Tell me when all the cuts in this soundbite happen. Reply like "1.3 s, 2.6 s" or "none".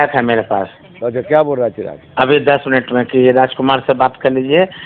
none